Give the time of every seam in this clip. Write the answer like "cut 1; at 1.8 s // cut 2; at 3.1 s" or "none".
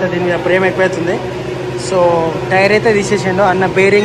none